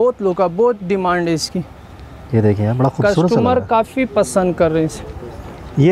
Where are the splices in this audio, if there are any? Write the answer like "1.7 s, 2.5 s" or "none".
none